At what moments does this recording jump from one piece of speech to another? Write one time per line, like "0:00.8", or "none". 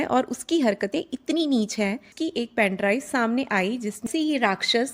0:02.1
0:04.1